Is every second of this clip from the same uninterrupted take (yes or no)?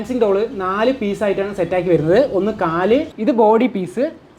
no